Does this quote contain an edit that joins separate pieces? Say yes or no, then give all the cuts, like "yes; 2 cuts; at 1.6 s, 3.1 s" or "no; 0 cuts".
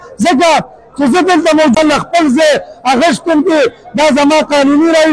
yes; 1 cut; at 1.8 s